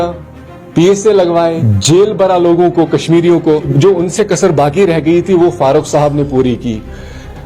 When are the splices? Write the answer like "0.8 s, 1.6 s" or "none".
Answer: 1.7 s, 3.7 s